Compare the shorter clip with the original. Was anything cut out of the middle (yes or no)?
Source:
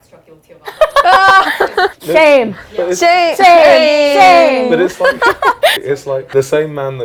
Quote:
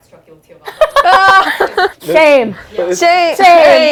no